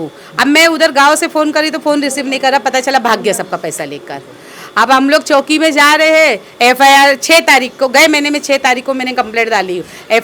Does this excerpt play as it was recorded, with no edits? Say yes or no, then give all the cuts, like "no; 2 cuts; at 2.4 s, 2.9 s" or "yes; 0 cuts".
yes; 0 cuts